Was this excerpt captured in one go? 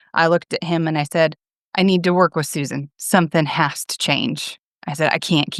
yes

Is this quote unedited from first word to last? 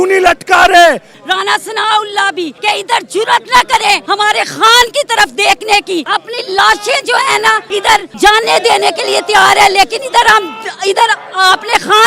no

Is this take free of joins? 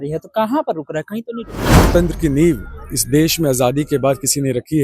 no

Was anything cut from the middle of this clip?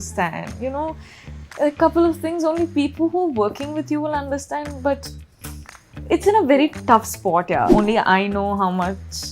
yes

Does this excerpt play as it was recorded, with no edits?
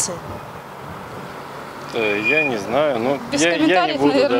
yes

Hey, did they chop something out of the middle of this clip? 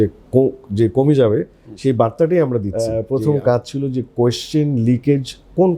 yes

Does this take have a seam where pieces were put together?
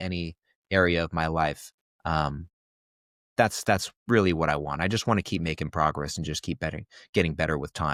no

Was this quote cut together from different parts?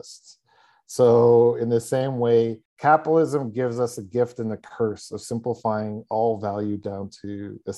yes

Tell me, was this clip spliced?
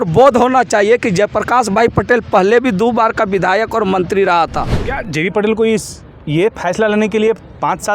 yes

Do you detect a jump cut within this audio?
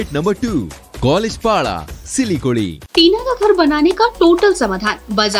yes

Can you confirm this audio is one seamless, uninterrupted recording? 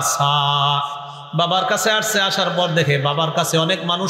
yes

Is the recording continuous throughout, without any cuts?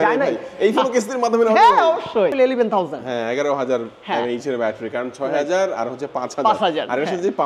no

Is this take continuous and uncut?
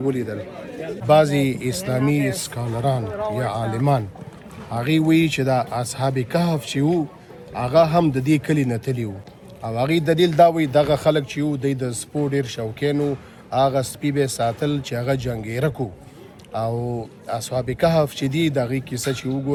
yes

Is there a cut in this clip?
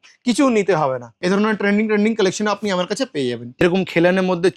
yes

